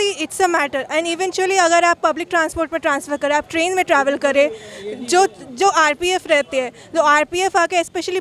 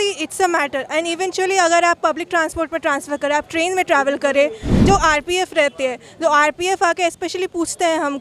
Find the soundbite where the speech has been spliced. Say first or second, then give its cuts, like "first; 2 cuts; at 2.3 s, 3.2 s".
second; 1 cut; at 4.7 s